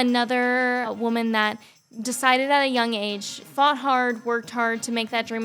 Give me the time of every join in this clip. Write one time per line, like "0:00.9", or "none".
0:00.9
0:03.4